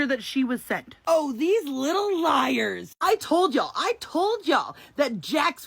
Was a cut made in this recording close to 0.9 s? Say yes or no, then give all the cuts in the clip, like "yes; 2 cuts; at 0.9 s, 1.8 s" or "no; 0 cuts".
yes; 1 cut; at 0.9 s